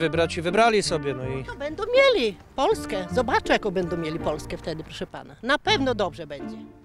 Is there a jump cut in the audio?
no; 0 cuts

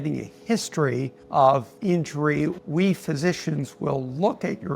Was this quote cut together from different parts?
yes; 1 cut; at 2.6 s

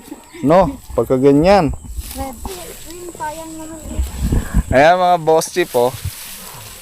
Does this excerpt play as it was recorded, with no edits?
no; 1 cut; at 2.3 s

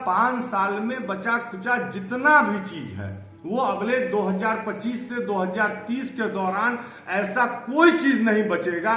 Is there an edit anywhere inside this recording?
no; 0 cuts

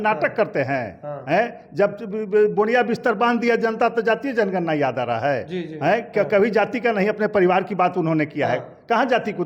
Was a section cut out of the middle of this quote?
no; 0 cuts

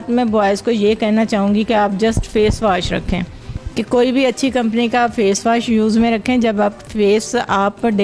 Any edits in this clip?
no; 0 cuts

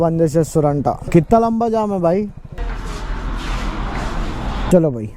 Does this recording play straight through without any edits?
no; 1 cut; at 2.6 s

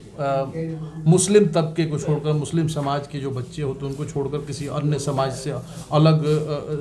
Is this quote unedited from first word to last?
yes; 0 cuts

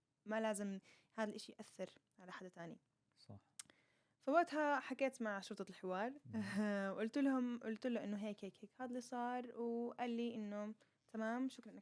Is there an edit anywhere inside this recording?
no; 0 cuts

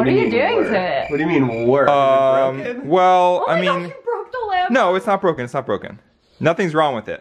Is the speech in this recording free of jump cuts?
yes; 0 cuts

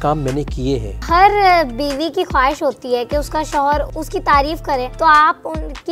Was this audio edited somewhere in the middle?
yes; 3 cuts; at 0.9 s, 3.9 s, 4.9 s

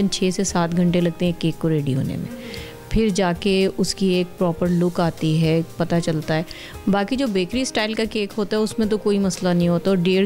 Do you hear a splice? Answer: no; 0 cuts

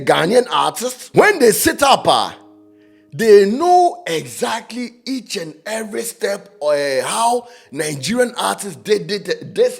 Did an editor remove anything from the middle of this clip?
yes; 1 cut; at 0.9 s

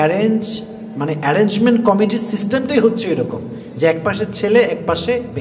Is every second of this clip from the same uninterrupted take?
yes; 0 cuts

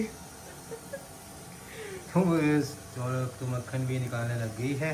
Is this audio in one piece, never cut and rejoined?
no; 1 cut; at 1.3 s

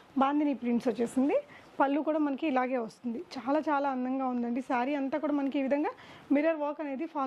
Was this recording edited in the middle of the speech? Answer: no; 0 cuts

